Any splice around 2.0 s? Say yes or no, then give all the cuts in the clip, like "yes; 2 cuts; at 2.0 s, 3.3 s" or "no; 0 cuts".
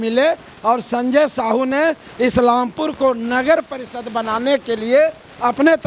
no; 0 cuts